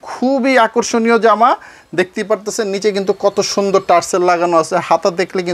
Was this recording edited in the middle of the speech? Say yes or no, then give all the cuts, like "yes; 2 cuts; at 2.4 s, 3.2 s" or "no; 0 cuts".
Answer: no; 0 cuts